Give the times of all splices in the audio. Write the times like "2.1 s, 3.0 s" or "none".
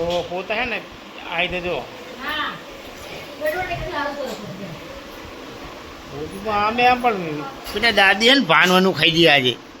7.7 s